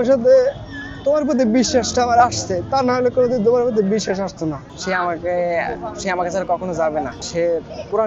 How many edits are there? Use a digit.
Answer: 1